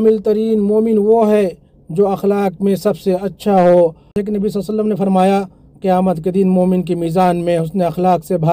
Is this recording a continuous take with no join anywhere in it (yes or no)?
no